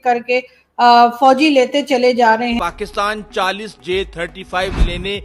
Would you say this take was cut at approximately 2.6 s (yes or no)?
yes